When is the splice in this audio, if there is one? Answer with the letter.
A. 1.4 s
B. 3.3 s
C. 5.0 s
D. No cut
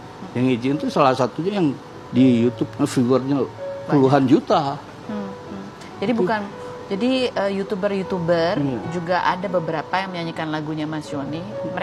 D